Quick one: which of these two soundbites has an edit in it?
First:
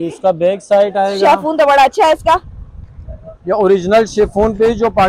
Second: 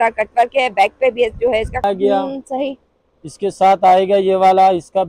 second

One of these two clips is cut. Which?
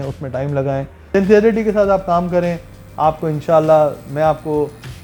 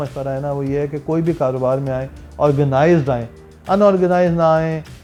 first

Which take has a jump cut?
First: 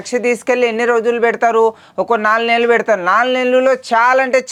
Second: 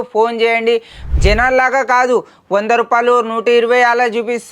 second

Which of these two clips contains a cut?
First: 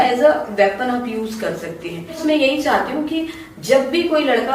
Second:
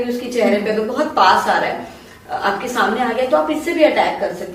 first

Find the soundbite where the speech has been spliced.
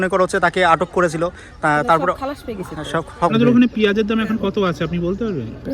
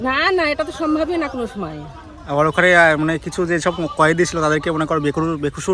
first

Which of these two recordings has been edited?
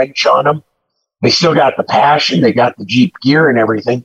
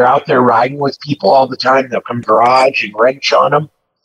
second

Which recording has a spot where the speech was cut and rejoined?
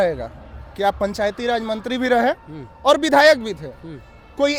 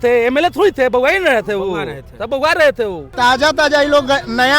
second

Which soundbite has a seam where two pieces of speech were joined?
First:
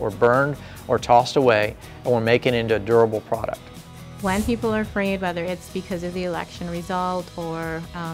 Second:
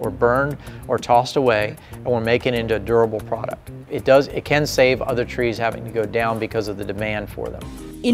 first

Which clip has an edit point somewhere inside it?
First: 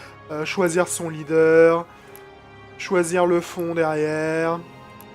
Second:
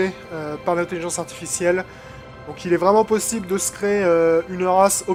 first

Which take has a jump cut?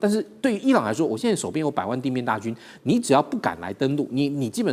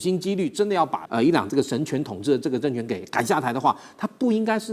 second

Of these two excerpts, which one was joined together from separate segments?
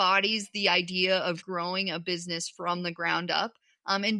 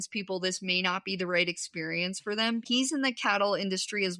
second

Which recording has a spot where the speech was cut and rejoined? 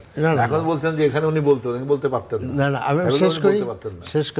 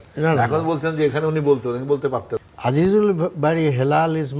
second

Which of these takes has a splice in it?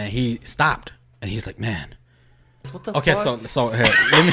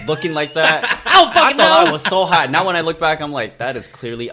first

